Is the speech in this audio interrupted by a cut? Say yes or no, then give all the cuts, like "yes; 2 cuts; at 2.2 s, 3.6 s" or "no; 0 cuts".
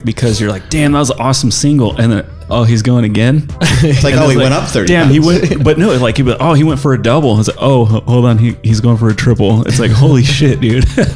no; 0 cuts